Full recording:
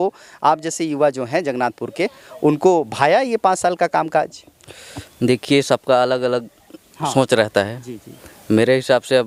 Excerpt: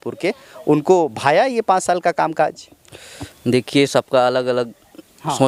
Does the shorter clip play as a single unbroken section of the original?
yes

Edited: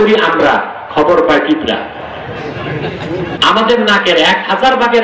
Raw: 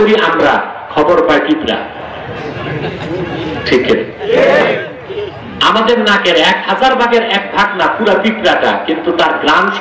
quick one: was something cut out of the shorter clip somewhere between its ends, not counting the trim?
yes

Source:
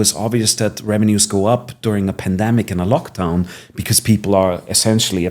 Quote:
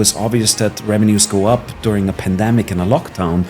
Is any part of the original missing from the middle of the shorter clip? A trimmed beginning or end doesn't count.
no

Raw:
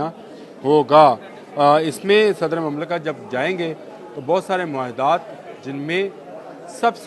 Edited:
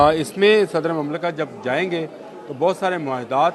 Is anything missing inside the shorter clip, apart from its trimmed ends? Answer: no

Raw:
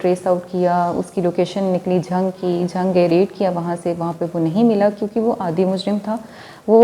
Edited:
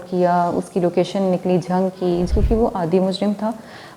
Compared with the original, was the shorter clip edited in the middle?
yes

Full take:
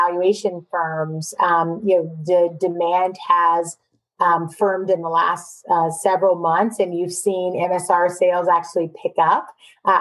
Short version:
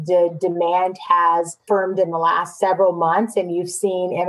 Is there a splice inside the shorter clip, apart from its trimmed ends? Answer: yes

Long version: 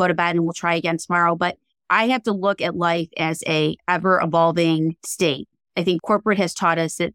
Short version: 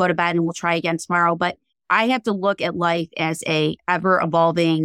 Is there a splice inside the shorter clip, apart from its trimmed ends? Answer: no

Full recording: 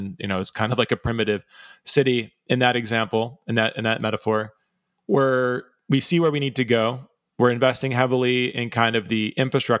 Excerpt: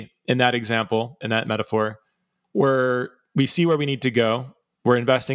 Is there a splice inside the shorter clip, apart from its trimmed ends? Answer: yes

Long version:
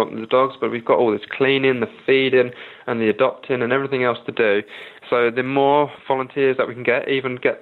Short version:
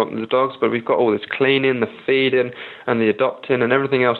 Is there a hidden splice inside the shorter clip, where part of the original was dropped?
no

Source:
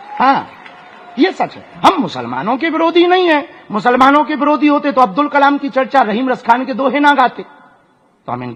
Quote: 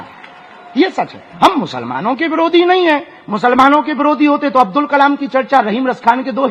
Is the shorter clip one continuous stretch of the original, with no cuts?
yes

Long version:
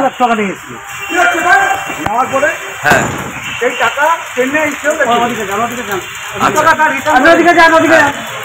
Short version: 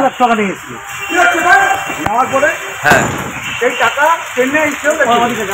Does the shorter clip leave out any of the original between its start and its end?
no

